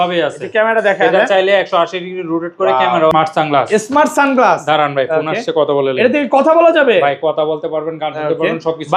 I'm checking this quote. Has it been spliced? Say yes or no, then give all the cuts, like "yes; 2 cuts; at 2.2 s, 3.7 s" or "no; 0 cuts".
yes; 1 cut; at 3.1 s